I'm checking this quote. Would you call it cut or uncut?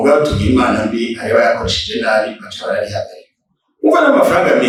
uncut